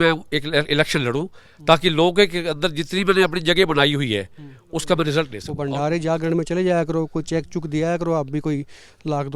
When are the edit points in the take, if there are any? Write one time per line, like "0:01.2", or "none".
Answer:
0:05.4